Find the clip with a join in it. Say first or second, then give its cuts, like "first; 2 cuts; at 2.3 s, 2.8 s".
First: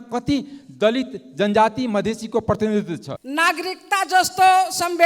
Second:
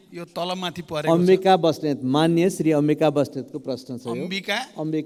first; 1 cut; at 3.1 s